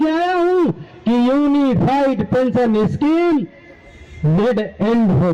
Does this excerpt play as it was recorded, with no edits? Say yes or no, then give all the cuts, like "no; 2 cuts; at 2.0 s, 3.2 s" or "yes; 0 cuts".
yes; 0 cuts